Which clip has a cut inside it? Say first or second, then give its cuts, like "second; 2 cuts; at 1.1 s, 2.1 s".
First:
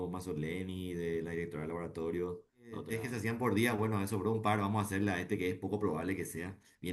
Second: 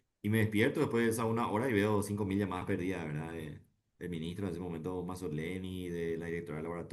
first; 1 cut; at 3.0 s